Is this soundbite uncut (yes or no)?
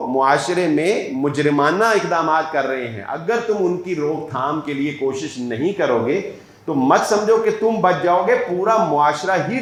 yes